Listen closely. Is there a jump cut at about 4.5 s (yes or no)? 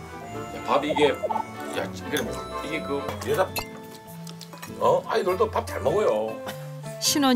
no